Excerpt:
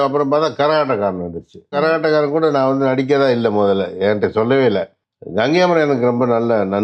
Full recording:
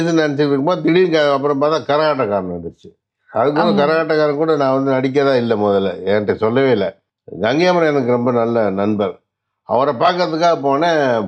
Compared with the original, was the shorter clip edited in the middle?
yes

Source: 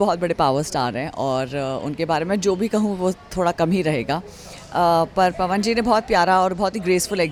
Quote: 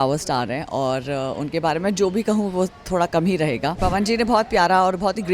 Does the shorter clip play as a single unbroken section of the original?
no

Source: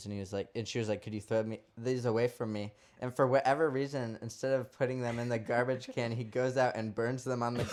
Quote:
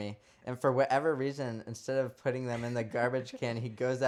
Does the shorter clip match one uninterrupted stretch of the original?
yes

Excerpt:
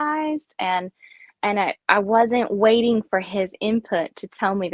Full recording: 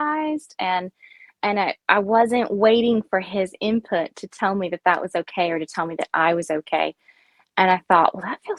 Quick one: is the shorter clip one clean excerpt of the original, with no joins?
yes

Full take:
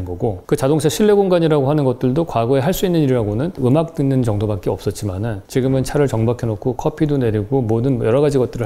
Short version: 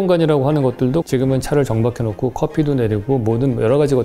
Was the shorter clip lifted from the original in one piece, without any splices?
no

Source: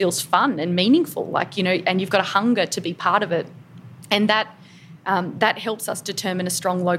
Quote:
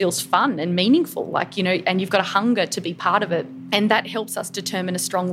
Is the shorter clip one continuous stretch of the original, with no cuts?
no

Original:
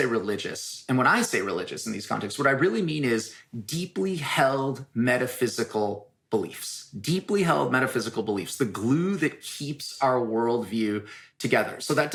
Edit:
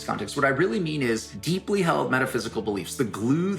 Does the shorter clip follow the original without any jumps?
no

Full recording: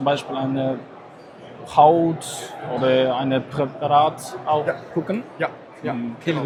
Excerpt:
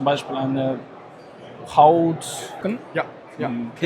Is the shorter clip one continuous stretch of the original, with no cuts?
no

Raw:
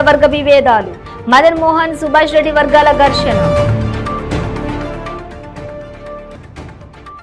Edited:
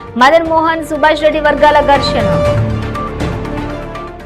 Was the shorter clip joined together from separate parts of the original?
no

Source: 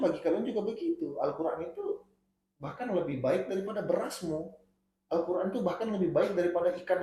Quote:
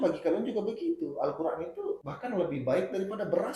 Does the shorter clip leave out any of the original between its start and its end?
yes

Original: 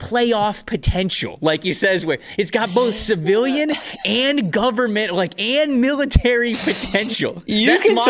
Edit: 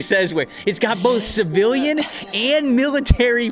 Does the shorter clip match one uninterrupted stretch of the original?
no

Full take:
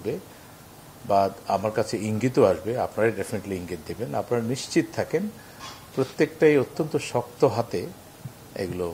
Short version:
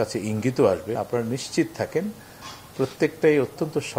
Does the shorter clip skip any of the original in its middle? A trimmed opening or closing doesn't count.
yes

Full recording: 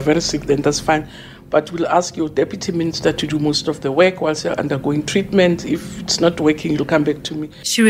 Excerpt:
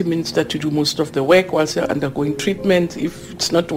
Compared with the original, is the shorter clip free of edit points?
yes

